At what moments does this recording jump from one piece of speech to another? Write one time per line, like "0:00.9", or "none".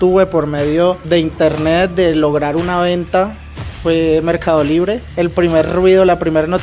0:05.2

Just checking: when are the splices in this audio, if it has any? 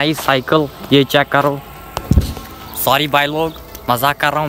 none

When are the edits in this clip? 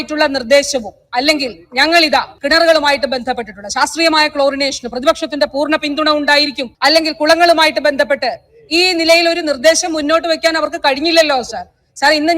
0:02.3
0:06.6

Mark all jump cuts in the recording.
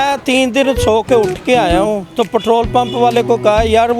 0:02.1

